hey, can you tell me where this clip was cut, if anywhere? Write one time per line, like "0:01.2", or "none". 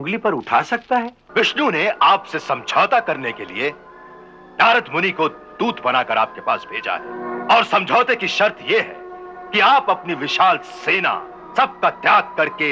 0:01.2
0:07.2
0:11.3